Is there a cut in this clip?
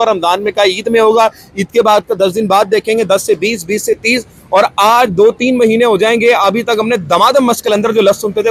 no; 0 cuts

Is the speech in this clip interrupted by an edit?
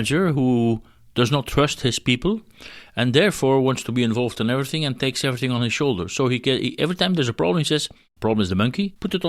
no; 0 cuts

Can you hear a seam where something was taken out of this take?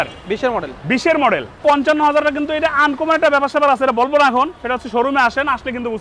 yes; 1 cut; at 1.6 s

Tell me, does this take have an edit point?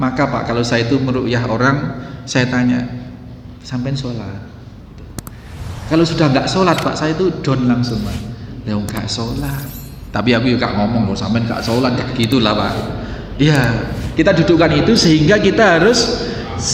no; 0 cuts

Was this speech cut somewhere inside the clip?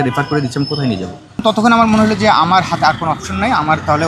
yes; 1 cut; at 1.4 s

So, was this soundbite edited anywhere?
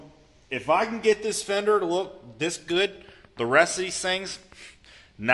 no; 0 cuts

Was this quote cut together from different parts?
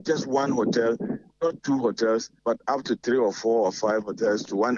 yes; 1 cut; at 2.3 s

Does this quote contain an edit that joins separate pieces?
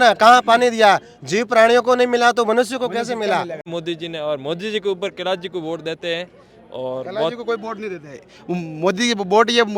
yes; 1 cut; at 3.7 s

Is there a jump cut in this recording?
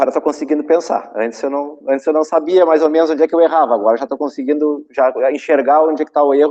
no; 0 cuts

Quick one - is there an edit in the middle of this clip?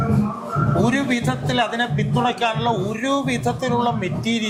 no; 0 cuts

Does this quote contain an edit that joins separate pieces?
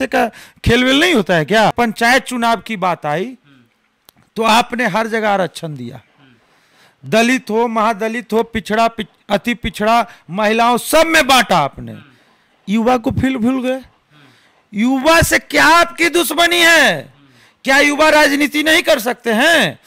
yes; 1 cut; at 1.7 s

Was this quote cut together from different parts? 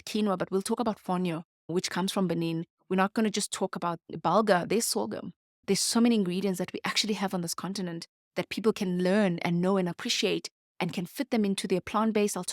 yes; 1 cut; at 4.1 s

